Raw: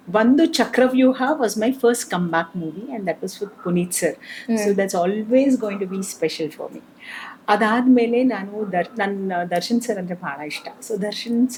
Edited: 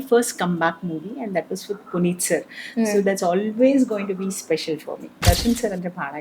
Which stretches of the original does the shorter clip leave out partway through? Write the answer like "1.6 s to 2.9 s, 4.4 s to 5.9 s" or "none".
6.9 s to 9.5 s